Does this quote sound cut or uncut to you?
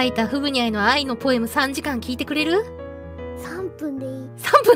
uncut